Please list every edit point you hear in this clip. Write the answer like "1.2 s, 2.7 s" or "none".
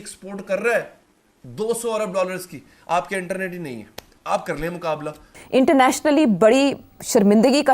5.4 s